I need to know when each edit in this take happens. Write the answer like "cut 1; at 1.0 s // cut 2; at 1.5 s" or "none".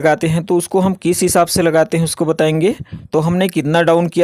cut 1; at 3.0 s